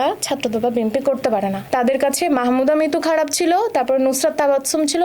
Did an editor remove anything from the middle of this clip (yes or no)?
yes